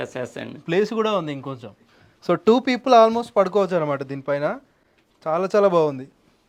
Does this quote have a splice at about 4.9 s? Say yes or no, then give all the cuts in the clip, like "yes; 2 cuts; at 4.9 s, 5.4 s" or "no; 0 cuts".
no; 0 cuts